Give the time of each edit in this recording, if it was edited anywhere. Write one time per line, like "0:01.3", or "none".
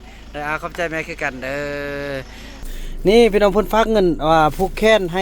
0:02.8